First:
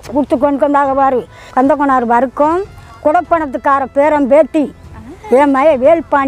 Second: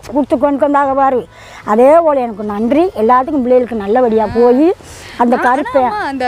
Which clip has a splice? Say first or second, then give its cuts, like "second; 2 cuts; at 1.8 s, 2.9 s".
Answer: first; 1 cut; at 1.4 s